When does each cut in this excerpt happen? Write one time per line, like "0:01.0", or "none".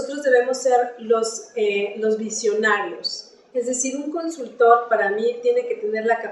none